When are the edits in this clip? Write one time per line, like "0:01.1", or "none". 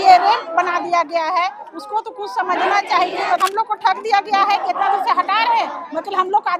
0:03.4